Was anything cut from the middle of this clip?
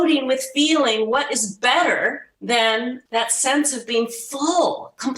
yes; 2 cuts; at 2.3 s, 3.0 s

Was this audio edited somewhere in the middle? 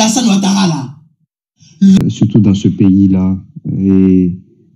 yes; 1 cut; at 2.0 s

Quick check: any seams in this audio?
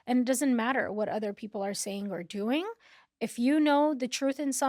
no; 0 cuts

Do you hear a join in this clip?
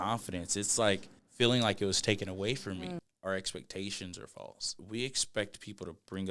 yes; 3 cuts; at 1.2 s, 3.0 s, 4.7 s

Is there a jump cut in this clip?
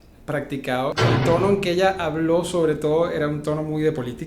yes; 1 cut; at 0.9 s

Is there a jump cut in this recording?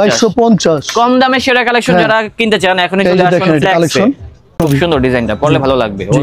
yes; 1 cut; at 4.4 s

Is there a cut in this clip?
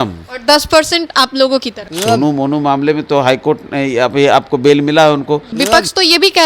yes; 2 cuts; at 1.8 s, 5.5 s

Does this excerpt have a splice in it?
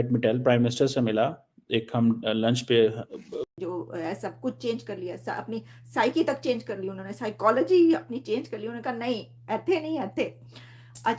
yes; 1 cut; at 3.5 s

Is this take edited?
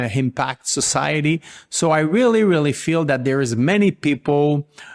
no; 0 cuts

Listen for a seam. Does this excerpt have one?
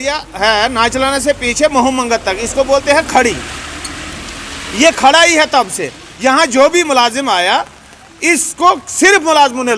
no; 0 cuts

